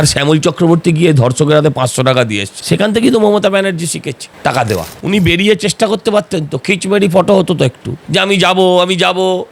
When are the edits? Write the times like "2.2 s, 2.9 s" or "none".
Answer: 2.5 s, 4.9 s